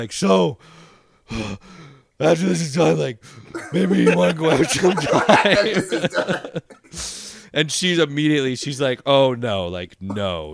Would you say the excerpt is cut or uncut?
uncut